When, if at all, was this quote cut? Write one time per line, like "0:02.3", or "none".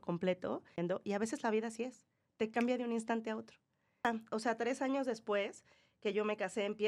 0:00.8
0:04.1

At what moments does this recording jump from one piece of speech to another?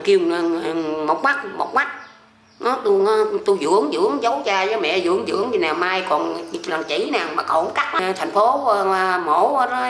0:08.0

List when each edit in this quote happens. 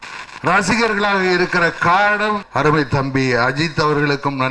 0:02.5

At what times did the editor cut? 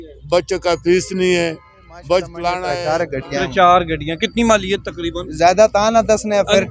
0:02.7

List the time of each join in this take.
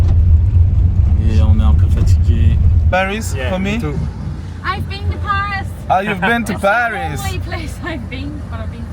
0:02.9

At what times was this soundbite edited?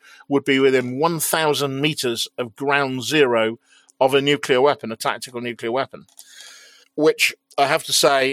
none

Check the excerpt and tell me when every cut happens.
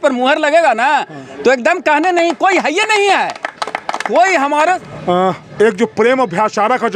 0:04.8

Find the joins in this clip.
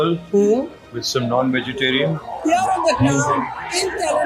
0:02.3

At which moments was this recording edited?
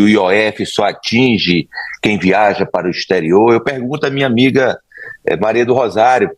none

